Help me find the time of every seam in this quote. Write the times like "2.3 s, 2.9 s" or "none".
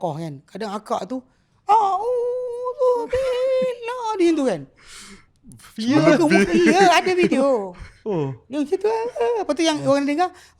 none

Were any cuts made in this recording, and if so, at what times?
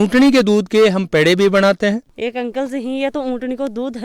2.1 s

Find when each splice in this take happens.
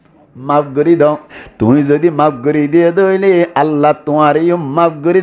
1.4 s

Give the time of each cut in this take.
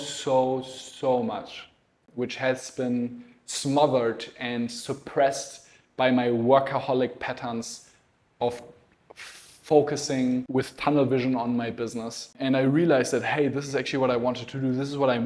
2.1 s, 10.5 s, 12.3 s

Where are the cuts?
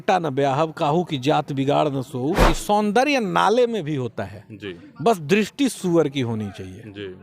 2.4 s

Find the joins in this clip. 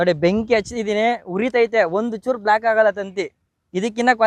none

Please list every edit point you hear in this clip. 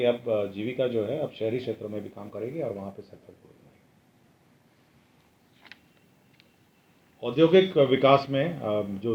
none

